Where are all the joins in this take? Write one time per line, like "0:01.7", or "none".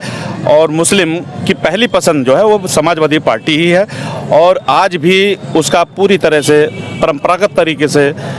none